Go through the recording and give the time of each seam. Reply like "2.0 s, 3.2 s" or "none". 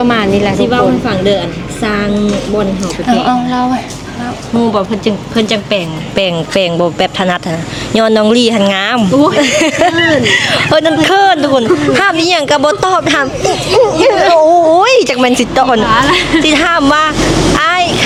none